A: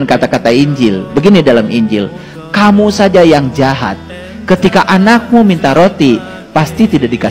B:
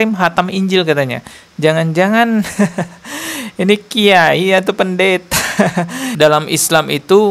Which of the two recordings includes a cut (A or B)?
B